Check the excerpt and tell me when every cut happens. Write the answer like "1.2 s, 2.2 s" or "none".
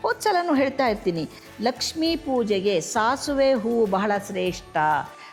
none